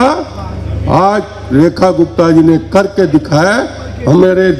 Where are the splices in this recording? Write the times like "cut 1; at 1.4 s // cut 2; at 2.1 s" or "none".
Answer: none